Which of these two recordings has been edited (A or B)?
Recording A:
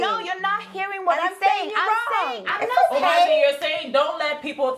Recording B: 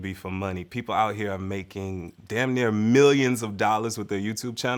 A